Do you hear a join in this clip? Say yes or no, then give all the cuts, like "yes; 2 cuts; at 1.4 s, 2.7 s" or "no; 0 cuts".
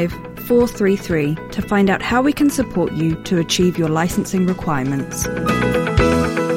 yes; 1 cut; at 5.2 s